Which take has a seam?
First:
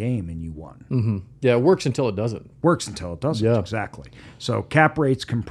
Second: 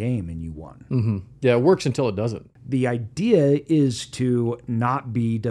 second; 1 cut; at 2.4 s

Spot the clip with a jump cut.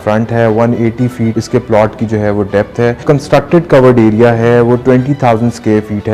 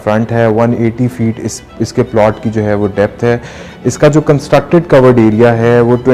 first; 2 cuts; at 1.4 s, 3.0 s

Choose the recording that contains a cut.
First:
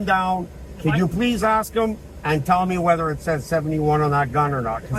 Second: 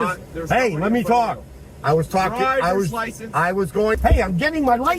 second; 1 cut; at 4.0 s

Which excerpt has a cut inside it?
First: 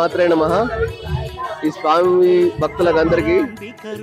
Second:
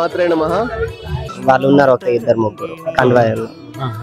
second; 1 cut; at 1.3 s

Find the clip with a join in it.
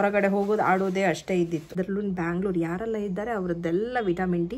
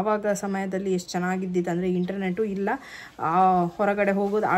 first; 1 cut; at 1.7 s

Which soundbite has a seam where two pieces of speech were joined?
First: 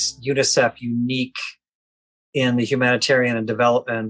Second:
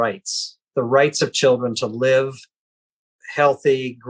second; 1 cut; at 3.2 s

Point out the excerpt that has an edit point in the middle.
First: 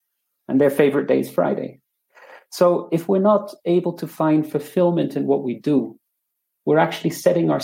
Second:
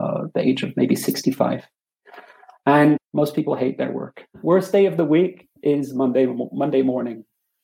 second; 2 cuts; at 3.1 s, 4.2 s

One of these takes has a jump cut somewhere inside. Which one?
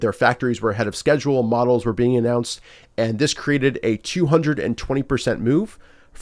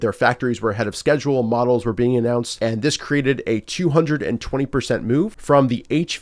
second; 2 cuts; at 2.5 s, 5.4 s

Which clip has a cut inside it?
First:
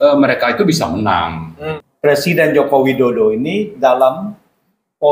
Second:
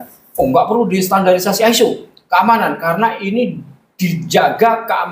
first; 1 cut; at 1.7 s

